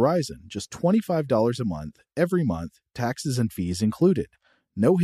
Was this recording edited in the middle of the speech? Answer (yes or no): no